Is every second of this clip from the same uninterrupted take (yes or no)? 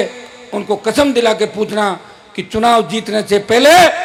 yes